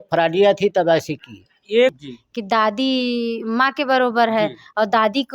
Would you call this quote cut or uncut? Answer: cut